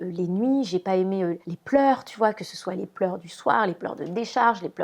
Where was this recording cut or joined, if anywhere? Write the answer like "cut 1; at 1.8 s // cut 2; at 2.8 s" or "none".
none